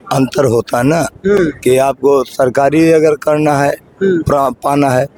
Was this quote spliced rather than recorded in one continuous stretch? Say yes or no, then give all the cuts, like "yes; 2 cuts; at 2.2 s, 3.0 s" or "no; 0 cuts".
no; 0 cuts